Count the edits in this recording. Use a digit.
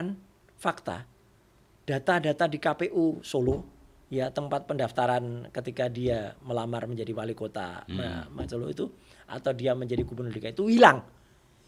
0